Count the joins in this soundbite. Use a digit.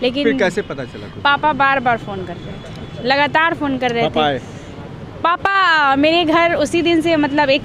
0